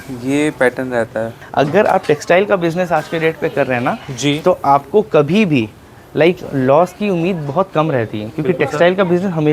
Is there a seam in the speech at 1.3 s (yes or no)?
yes